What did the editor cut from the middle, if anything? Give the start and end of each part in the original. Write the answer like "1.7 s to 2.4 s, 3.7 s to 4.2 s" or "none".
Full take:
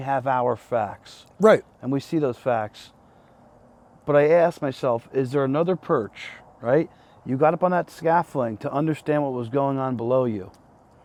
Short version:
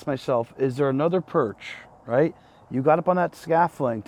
none